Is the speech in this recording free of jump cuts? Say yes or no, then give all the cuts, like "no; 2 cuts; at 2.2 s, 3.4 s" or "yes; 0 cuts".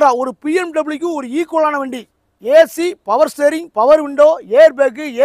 yes; 0 cuts